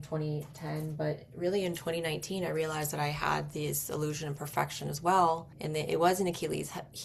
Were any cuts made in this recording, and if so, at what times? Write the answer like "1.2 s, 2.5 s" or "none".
5.5 s

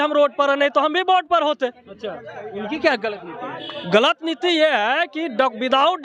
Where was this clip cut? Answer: none

